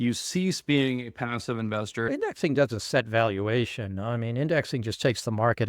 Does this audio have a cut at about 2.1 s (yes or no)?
yes